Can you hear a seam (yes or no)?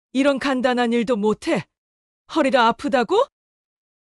no